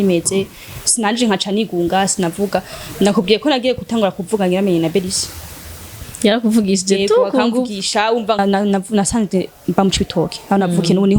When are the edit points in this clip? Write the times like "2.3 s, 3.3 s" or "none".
8.4 s